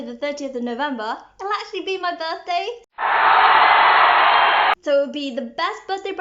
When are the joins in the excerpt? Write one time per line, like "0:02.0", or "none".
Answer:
0:04.7

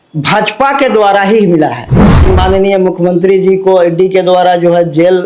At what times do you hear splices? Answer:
0:02.3

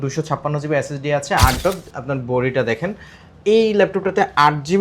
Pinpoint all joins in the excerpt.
0:01.6

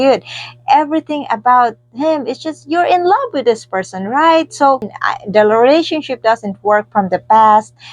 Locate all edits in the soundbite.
0:04.9

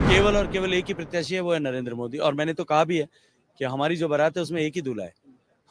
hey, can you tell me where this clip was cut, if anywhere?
none

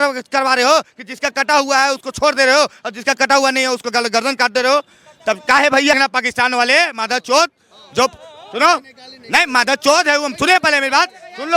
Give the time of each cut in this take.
0:06.1

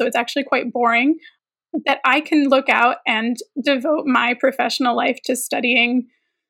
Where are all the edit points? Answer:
0:01.3

